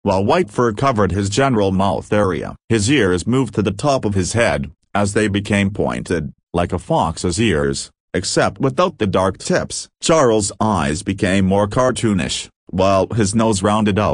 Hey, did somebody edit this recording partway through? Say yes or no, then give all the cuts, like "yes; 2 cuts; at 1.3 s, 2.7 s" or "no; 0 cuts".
no; 0 cuts